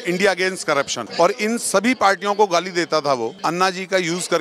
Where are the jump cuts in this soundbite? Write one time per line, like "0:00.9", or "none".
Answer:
0:01.0
0:03.4